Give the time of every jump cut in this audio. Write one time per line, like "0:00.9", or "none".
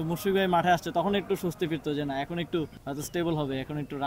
0:02.8